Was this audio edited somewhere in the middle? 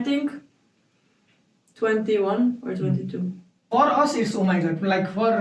yes; 1 cut; at 3.7 s

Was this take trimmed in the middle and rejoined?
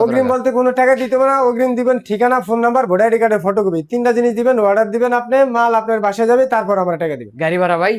no; 0 cuts

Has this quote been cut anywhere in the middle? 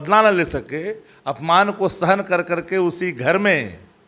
no; 0 cuts

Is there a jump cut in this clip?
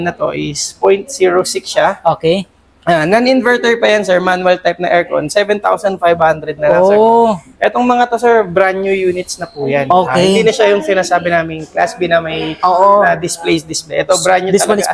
no; 0 cuts

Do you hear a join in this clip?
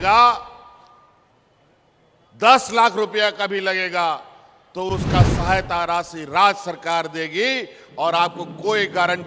no; 0 cuts

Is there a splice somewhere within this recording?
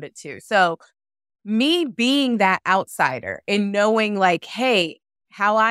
no; 0 cuts

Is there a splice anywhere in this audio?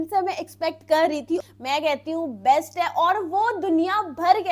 yes; 1 cut; at 1.4 s

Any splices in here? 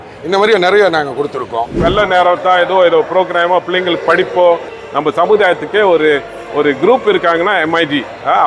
yes; 2 cuts; at 1.8 s, 4.7 s

